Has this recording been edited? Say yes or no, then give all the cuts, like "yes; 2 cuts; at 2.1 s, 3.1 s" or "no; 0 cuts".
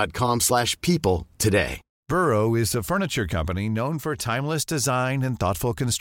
yes; 1 cut; at 2.0 s